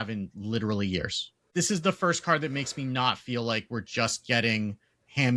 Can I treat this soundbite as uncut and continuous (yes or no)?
no